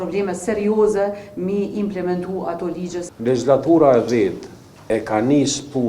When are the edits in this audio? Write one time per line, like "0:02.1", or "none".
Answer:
0:03.1